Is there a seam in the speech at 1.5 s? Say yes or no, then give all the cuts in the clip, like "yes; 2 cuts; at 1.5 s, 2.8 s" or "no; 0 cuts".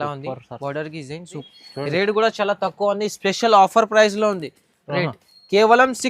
yes; 1 cut; at 1.5 s